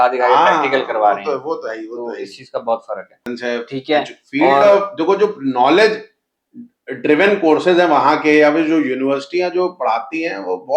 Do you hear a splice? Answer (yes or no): yes